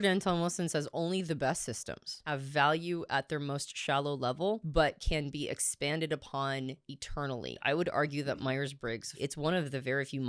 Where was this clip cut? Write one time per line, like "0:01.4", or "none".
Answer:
0:02.2
0:04.6
0:07.6
0:09.2